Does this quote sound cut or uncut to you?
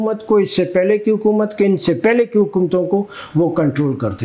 uncut